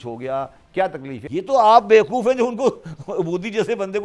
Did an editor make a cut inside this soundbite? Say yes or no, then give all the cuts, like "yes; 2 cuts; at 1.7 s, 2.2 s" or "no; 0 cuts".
yes; 1 cut; at 1.2 s